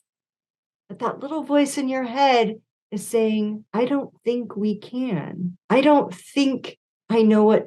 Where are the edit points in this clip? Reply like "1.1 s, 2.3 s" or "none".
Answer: 3.6 s, 5.6 s